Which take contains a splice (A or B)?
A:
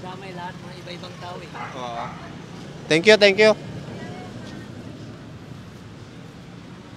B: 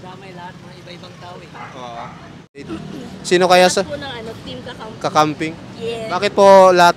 B